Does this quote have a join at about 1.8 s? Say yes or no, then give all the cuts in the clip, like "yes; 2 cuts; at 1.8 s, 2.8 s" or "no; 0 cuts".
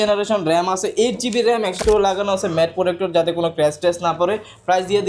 yes; 1 cut; at 1.8 s